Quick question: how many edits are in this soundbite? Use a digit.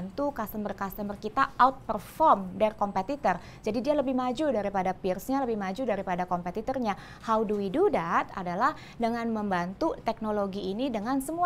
0